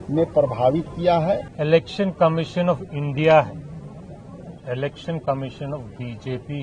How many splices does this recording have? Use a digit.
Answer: 1